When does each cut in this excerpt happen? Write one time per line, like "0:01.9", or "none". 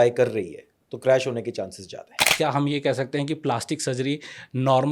0:02.3